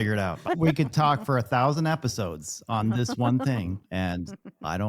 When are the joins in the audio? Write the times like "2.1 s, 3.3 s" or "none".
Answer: 3.8 s